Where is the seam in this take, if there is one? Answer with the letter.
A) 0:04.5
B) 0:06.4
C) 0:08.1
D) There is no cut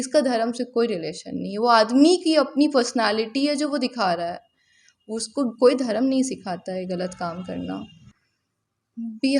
C